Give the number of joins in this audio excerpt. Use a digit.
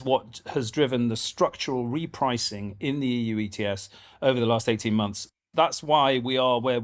1